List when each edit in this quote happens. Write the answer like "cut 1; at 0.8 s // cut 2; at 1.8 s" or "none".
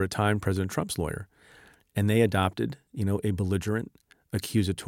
cut 1; at 2.9 s